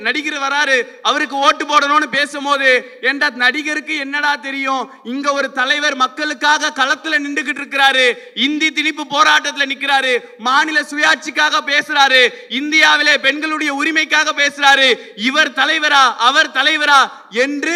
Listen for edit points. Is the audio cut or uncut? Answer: uncut